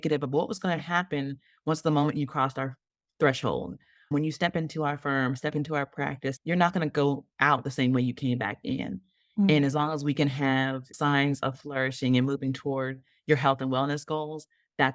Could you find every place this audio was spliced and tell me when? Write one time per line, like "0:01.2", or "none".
0:04.1
0:06.4
0:10.9